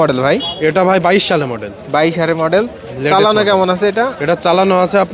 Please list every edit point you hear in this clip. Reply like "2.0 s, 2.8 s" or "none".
none